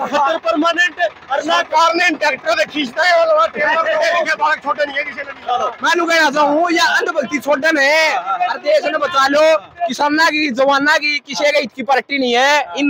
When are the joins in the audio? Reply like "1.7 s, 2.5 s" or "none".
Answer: none